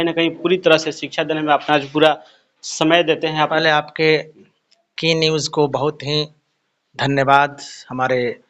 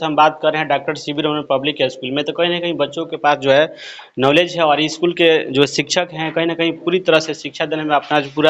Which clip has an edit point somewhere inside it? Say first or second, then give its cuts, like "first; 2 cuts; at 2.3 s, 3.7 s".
first; 1 cut; at 3.5 s